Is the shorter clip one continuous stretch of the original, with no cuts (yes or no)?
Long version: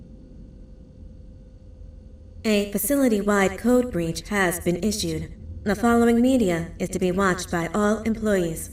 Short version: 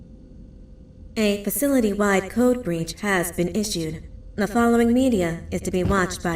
no